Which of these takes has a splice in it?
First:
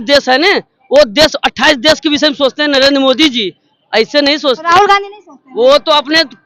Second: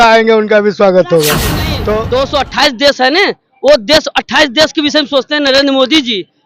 second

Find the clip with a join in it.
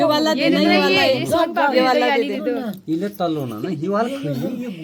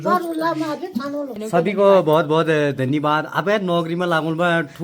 second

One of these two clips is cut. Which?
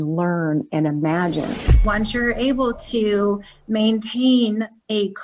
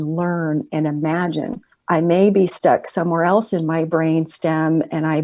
first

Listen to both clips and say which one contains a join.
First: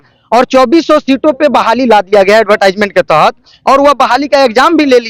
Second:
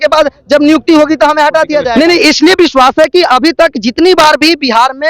second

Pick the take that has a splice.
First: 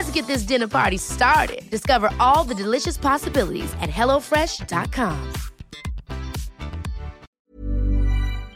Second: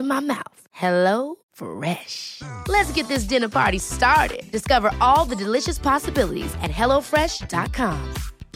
first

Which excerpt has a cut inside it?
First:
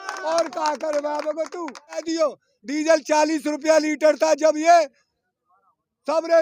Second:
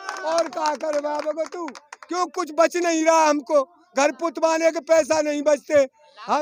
first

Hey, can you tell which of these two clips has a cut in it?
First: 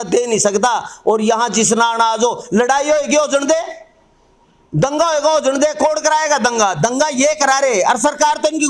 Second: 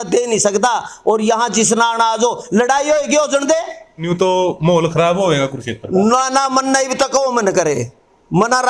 second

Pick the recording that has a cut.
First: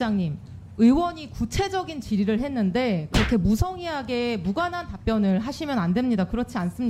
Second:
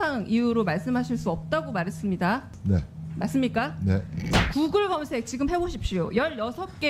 second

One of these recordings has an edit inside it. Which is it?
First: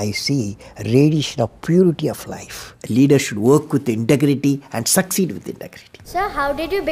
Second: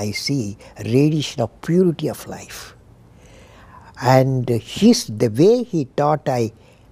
first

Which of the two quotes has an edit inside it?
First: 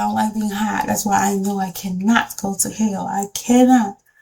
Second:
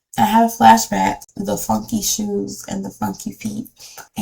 second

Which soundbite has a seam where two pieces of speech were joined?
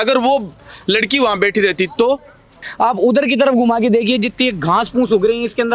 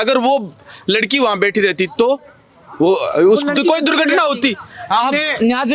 first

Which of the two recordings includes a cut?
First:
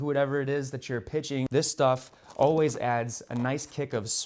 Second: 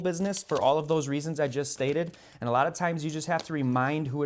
first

